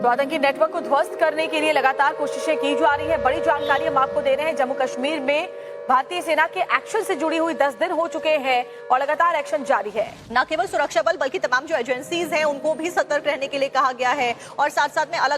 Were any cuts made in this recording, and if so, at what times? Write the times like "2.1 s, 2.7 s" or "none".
none